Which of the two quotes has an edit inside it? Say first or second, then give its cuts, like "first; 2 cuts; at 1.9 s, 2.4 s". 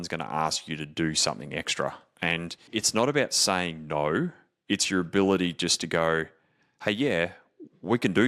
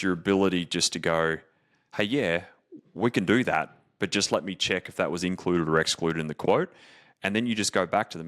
first; 1 cut; at 2.7 s